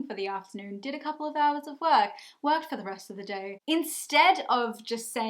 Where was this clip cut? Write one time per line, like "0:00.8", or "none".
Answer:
0:03.5